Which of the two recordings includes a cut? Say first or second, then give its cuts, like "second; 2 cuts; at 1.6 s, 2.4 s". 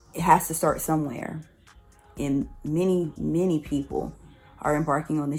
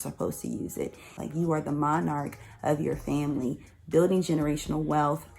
second; 1 cut; at 1.2 s